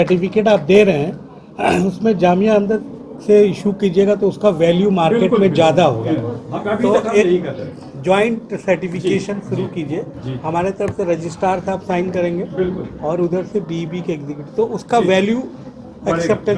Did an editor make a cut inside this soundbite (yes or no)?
no